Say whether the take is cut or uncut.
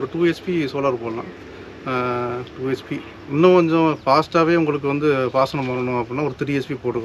uncut